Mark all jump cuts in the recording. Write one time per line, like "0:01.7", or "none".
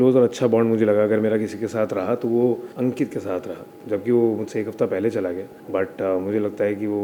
none